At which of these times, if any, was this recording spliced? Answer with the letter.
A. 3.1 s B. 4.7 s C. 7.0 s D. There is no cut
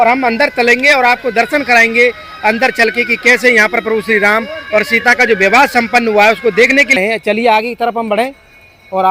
C